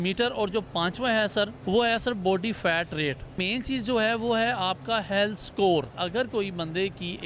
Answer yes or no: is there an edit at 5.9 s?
yes